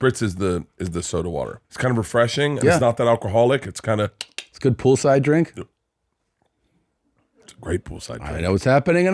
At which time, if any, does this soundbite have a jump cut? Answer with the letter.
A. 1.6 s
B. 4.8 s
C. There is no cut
A